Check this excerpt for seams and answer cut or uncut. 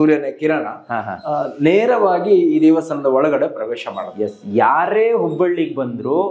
uncut